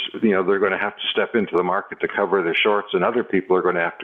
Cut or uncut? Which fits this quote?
uncut